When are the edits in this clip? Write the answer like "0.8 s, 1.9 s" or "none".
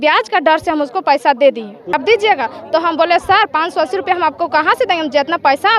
1.9 s

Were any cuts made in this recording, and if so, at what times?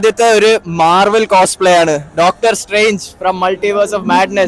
none

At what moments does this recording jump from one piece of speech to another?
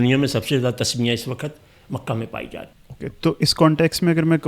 2.8 s

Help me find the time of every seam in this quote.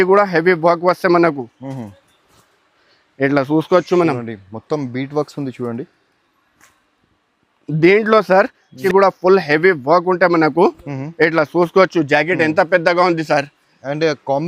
8.7 s

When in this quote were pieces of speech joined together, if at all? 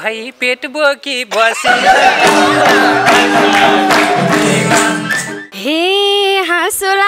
5.5 s

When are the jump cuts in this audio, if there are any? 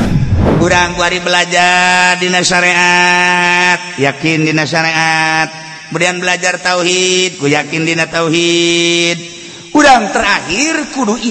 none

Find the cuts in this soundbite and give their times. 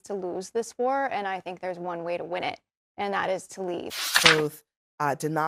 4.1 s

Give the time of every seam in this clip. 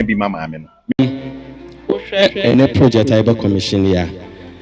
0.9 s

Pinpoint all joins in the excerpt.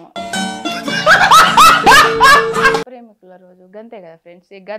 2.9 s

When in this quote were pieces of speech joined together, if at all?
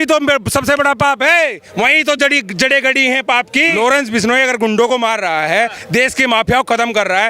3.8 s

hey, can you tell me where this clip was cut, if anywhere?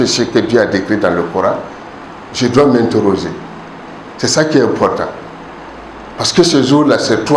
none

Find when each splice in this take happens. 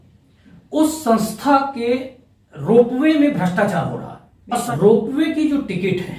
4.7 s

